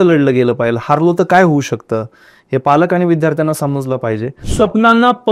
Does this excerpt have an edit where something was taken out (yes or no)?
yes